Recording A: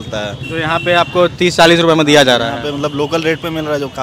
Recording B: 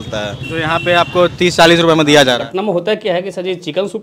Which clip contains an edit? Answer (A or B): B